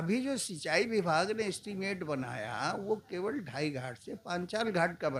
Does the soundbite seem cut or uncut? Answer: uncut